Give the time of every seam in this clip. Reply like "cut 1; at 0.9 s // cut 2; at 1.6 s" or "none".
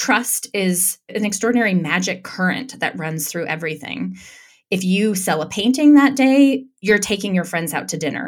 cut 1; at 0.9 s